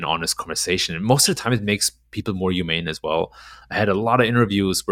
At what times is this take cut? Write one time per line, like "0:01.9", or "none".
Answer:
none